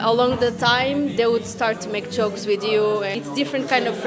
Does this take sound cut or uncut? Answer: cut